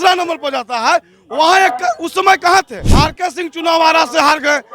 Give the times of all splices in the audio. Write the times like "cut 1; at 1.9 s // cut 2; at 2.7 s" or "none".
cut 1; at 2.8 s